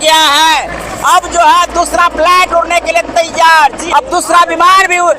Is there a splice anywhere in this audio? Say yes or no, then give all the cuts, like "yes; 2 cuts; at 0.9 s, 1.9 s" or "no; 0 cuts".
yes; 1 cut; at 3.8 s